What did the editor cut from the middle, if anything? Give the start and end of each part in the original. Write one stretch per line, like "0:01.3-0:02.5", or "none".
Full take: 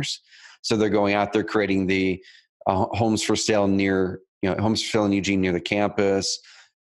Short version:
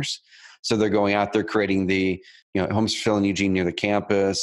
0:02.4-0:04.3